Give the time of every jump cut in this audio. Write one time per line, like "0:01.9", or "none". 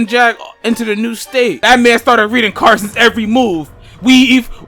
0:01.6